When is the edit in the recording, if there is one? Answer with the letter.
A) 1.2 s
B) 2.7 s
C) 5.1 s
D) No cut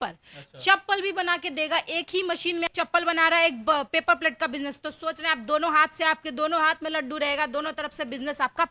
B